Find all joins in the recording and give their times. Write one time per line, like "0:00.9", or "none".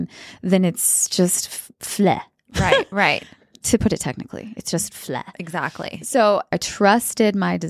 0:06.6